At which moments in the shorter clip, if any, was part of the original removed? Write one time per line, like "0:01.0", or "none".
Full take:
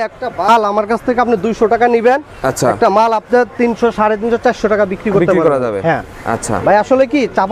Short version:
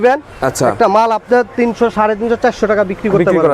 none